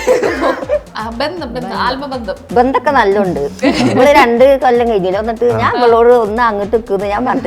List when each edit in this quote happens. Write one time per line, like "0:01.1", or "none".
0:00.9